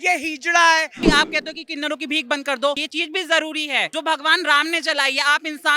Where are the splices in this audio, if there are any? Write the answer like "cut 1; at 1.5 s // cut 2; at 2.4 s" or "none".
cut 1; at 1.1 s // cut 2; at 2.9 s // cut 3; at 3.9 s